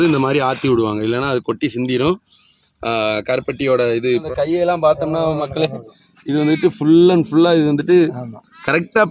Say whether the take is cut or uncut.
cut